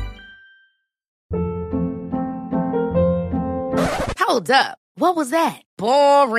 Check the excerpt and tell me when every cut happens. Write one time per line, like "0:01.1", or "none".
0:01.1

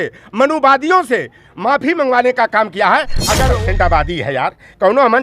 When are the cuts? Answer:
0:03.5

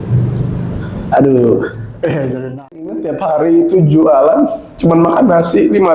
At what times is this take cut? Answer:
0:02.8

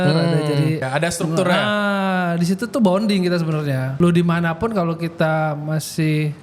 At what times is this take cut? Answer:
0:00.9
0:03.9

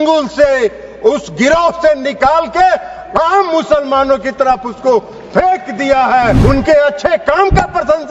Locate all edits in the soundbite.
0:06.4

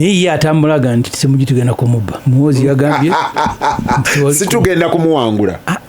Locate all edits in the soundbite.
0:02.1

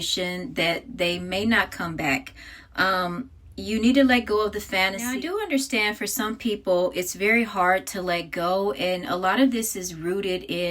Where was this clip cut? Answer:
0:05.0

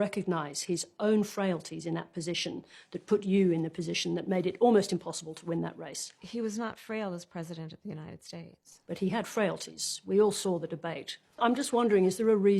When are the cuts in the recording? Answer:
0:11.4

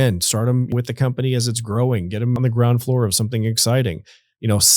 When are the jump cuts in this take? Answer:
0:00.7
0:02.4

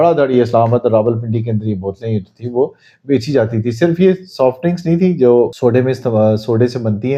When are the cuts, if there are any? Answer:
none

